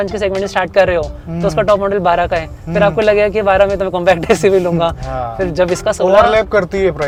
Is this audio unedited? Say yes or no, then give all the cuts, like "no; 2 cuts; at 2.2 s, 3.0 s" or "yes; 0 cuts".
yes; 0 cuts